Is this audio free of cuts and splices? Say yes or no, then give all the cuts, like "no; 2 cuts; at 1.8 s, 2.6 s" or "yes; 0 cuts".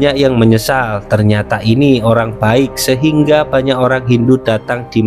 yes; 0 cuts